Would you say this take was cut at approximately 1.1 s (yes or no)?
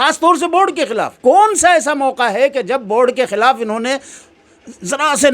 yes